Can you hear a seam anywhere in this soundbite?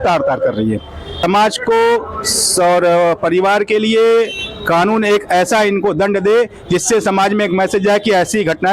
yes; 1 cut; at 1.2 s

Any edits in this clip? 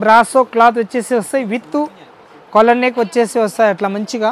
no; 0 cuts

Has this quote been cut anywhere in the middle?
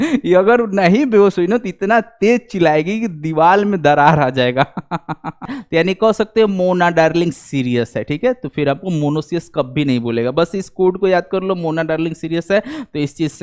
yes; 1 cut; at 5.6 s

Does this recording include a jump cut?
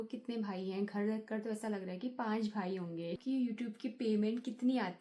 yes; 1 cut; at 3.2 s

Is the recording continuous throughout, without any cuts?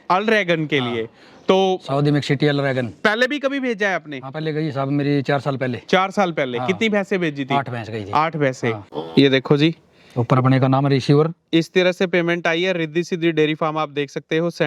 no; 1 cut; at 8.9 s

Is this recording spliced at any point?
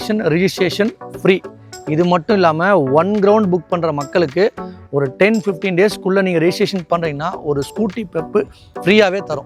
no; 0 cuts

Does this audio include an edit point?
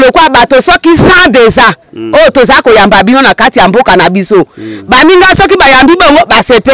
no; 0 cuts

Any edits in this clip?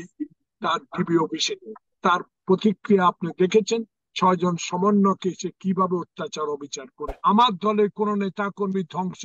yes; 1 cut; at 7.1 s

